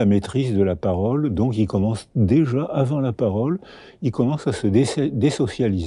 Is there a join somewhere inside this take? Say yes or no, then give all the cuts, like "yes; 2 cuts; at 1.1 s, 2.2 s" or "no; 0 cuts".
no; 0 cuts